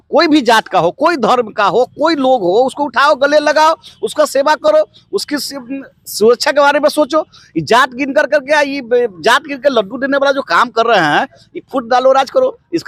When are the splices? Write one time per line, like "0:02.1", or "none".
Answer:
none